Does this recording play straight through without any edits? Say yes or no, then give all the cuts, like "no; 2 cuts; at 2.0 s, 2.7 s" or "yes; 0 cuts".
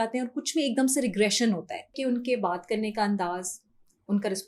no; 1 cut; at 1.9 s